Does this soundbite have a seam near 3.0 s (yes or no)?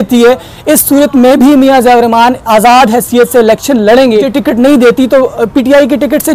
no